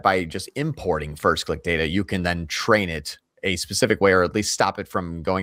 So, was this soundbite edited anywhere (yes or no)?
no